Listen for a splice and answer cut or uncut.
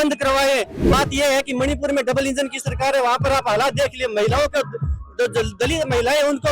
cut